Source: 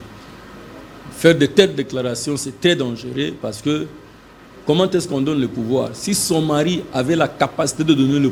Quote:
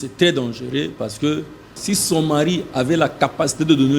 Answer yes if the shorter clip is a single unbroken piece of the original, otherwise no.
no